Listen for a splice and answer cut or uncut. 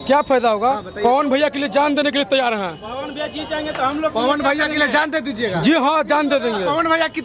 uncut